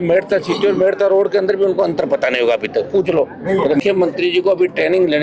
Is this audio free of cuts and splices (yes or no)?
no